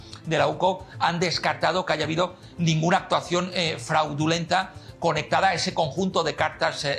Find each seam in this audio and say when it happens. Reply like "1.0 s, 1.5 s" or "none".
none

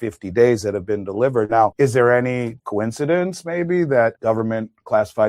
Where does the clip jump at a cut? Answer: 1.7 s, 2.6 s, 4.2 s

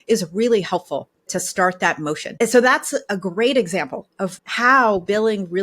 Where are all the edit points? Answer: 1.3 s, 2.3 s, 4.4 s

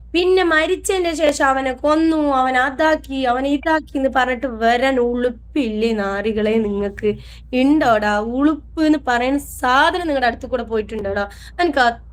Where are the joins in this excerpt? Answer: none

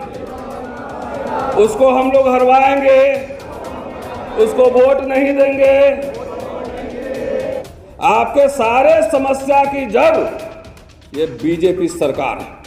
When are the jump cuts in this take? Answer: 7.7 s

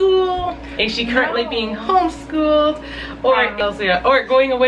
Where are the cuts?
3.6 s

